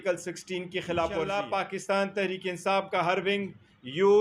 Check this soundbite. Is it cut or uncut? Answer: cut